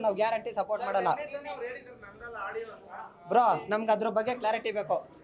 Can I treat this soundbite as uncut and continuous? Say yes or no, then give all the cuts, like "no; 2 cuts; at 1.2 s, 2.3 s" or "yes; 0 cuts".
yes; 0 cuts